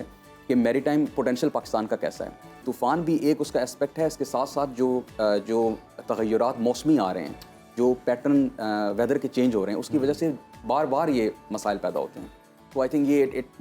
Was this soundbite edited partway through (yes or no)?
yes